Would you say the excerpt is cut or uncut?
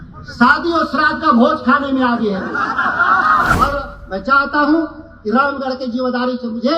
cut